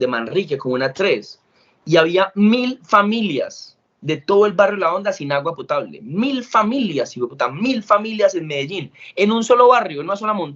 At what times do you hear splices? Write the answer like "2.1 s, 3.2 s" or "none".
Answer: none